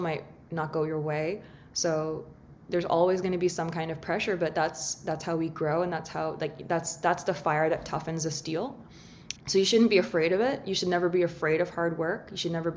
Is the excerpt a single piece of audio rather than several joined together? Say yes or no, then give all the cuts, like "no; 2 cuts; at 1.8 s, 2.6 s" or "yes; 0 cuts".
yes; 0 cuts